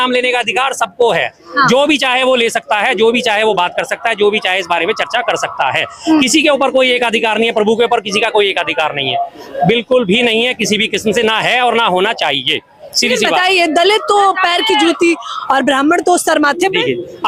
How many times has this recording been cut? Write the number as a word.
zero